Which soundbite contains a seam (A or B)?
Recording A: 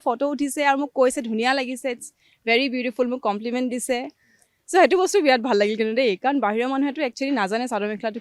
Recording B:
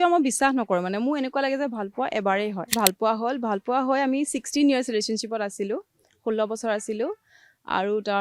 B